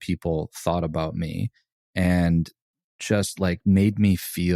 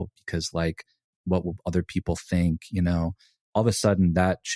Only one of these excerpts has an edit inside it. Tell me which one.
first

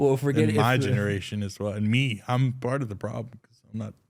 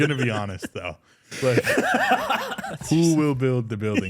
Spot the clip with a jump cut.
second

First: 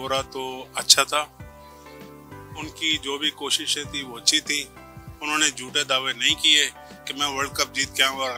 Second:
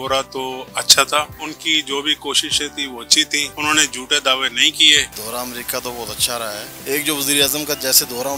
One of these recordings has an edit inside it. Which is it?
second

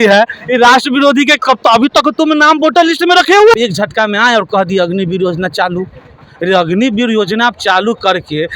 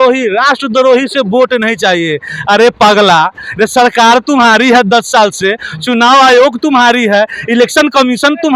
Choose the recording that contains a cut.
first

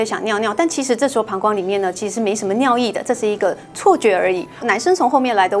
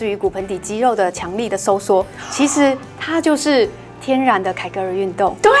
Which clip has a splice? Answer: first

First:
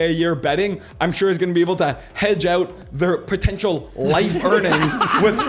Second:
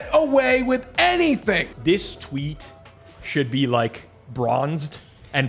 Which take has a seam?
second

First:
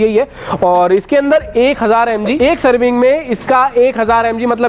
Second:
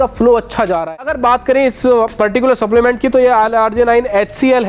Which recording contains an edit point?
second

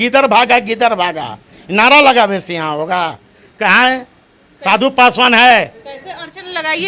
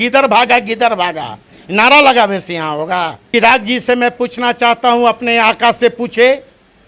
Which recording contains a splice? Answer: second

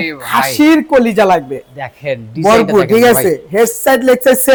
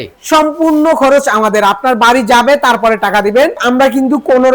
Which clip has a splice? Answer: second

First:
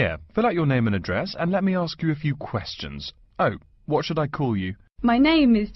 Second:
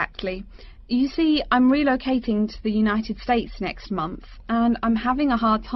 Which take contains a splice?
first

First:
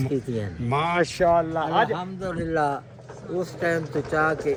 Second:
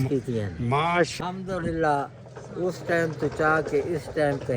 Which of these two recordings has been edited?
second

